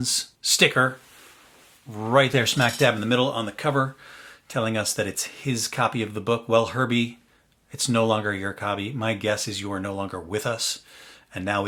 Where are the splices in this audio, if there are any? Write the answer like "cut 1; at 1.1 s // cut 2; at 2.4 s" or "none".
none

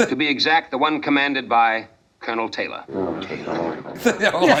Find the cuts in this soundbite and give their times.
none

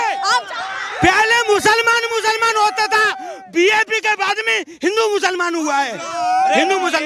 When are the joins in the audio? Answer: none

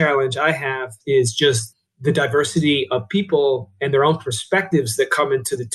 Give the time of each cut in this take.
cut 1; at 0.9 s

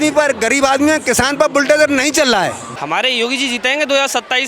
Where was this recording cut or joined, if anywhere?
cut 1; at 2.7 s

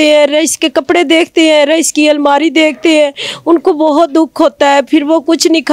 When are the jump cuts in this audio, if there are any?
none

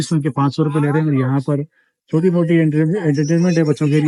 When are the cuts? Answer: none

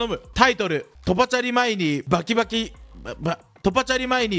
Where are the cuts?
cut 1; at 3.5 s

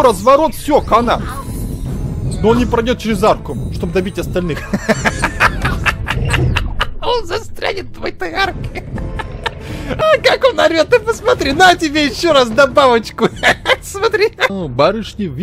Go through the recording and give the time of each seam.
cut 1; at 10.0 s // cut 2; at 14.5 s

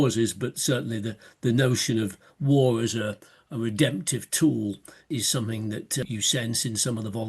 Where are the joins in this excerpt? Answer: cut 1; at 5.0 s // cut 2; at 6.1 s

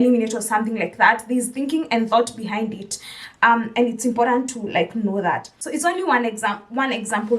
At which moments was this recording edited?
cut 1; at 5.5 s

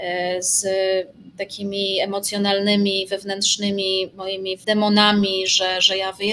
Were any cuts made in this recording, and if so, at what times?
cut 1; at 4.6 s

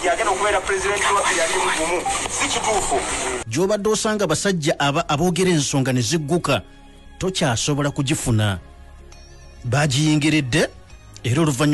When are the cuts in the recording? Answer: cut 1; at 3.5 s

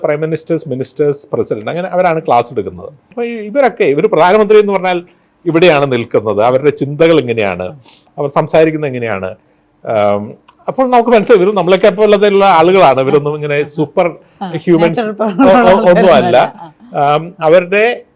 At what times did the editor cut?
cut 1; at 3.1 s

